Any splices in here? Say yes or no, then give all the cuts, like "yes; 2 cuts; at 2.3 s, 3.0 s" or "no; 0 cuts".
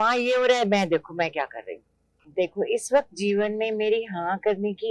yes; 1 cut; at 2.3 s